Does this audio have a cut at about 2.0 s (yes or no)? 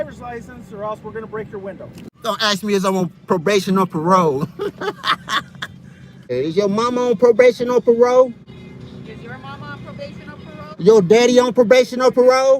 yes